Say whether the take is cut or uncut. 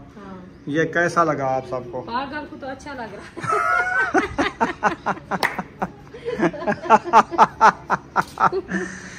uncut